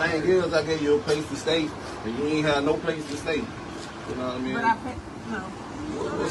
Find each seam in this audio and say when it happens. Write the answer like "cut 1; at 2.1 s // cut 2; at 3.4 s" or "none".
none

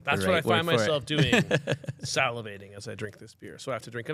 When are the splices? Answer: none

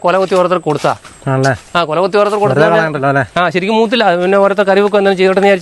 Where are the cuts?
none

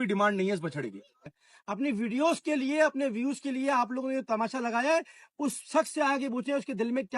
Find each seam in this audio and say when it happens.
cut 1; at 1.2 s

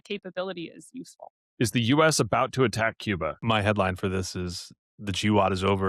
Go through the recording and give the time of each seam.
cut 1; at 1.4 s // cut 2; at 3.4 s

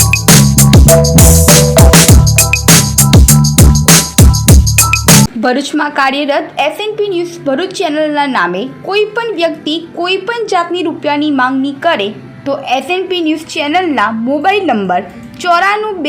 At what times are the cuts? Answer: cut 1; at 5.3 s

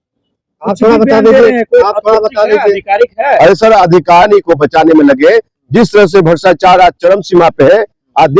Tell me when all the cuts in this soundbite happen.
cut 1; at 4.2 s

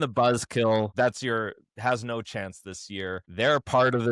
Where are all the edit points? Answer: cut 1; at 0.9 s // cut 2; at 3.2 s

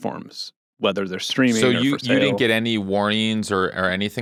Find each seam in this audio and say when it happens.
none

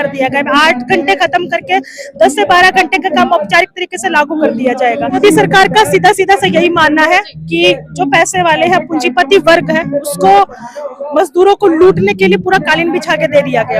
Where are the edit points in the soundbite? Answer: cut 1; at 5.2 s

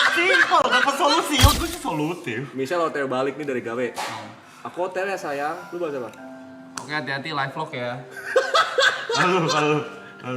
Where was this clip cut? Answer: cut 1; at 1.6 s

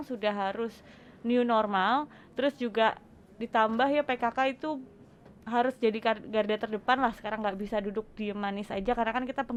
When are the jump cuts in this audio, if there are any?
none

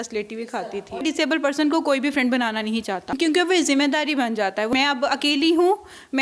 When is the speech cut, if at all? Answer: cut 1; at 1.0 s // cut 2; at 3.1 s // cut 3; at 4.7 s

